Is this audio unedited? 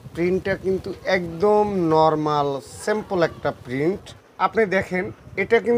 no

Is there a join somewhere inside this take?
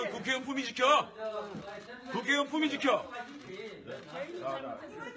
no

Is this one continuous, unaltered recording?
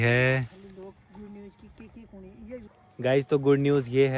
yes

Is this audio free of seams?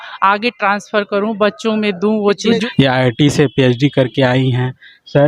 no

